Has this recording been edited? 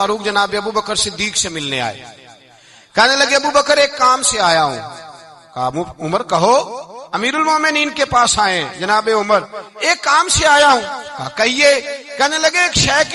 no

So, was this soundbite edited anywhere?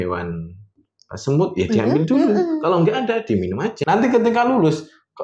yes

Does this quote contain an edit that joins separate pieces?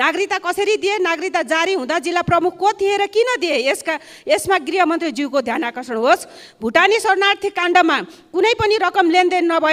no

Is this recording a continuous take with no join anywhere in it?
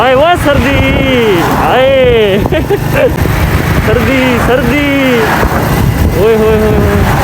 no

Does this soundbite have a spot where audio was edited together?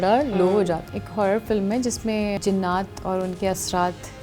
yes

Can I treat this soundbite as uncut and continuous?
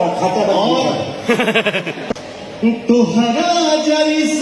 no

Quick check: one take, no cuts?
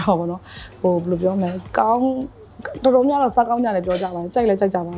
yes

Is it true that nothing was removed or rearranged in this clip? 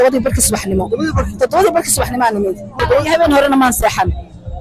no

